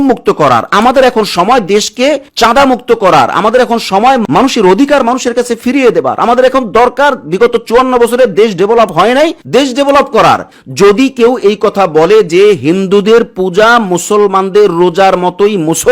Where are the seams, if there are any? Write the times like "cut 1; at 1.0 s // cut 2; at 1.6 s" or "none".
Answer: cut 1; at 10.6 s